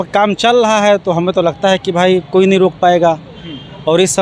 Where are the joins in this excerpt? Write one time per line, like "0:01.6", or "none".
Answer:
none